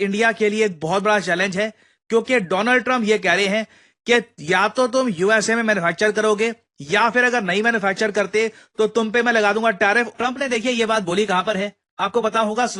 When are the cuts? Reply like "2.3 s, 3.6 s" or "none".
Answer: 10.1 s